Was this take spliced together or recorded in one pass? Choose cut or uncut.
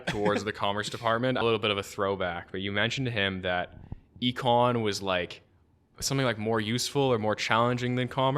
cut